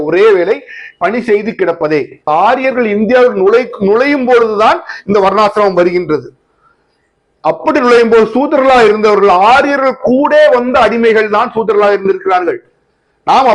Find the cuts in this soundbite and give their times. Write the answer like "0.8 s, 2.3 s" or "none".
2.3 s